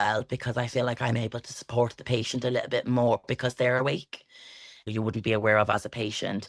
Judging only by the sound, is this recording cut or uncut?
cut